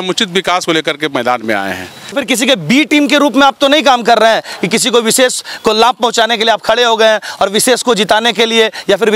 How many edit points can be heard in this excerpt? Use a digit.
1